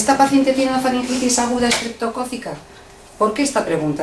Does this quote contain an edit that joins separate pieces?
no; 0 cuts

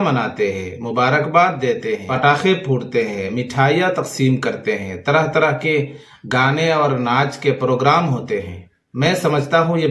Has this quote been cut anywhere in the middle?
no; 0 cuts

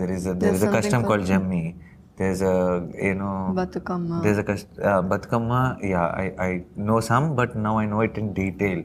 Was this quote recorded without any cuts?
yes; 0 cuts

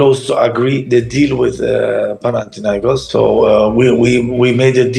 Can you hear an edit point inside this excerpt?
no; 0 cuts

